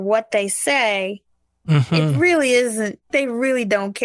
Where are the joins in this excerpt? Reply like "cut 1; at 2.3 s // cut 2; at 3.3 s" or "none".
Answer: none